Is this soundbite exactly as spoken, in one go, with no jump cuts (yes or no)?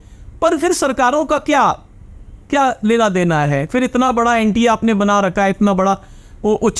yes